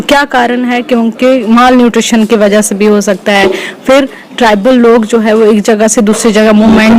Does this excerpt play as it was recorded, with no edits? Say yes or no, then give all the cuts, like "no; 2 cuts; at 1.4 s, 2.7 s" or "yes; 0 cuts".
yes; 0 cuts